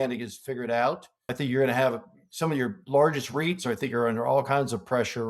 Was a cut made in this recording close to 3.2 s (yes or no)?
no